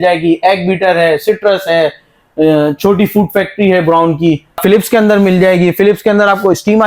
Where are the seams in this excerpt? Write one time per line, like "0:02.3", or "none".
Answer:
0:04.6